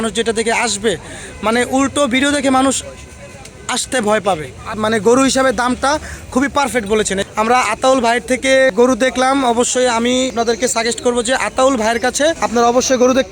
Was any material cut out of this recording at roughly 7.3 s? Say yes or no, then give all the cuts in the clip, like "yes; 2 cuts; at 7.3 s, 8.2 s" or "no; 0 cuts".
yes; 5 cuts; at 4.8 s, 7.3 s, 8.7 s, 10.3 s, 12.4 s